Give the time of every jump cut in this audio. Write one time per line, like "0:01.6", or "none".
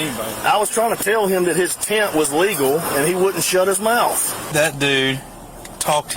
0:04.5